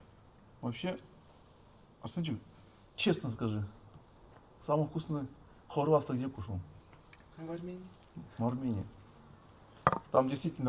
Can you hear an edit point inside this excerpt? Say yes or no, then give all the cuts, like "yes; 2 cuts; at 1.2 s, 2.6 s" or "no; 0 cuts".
no; 0 cuts